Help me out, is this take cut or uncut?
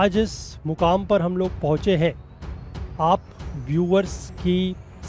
uncut